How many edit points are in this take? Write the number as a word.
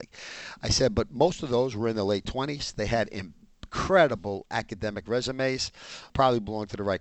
one